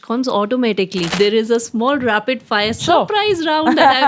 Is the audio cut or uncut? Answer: cut